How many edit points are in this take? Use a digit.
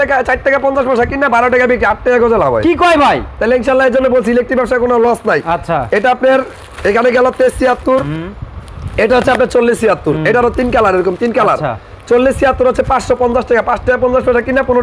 0